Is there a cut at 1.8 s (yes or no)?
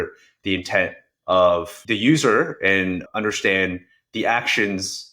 yes